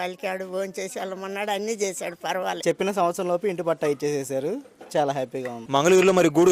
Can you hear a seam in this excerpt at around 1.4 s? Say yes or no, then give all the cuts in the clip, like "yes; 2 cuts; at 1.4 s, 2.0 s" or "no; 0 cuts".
no; 2 cuts; at 2.6 s, 5.6 s